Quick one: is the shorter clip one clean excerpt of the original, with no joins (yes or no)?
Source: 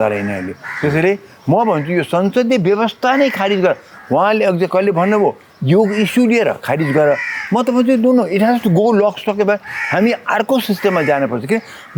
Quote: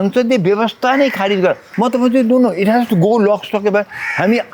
no